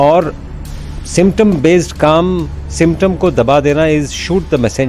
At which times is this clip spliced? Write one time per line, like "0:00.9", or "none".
none